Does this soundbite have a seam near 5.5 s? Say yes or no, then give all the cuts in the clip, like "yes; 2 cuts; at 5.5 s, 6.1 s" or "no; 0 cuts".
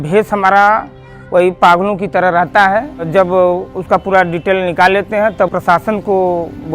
yes; 2 cuts; at 3.1 s, 5.5 s